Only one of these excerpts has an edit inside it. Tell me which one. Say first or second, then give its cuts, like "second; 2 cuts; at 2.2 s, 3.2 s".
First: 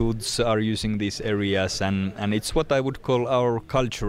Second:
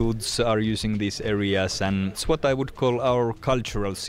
second; 1 cut; at 2.2 s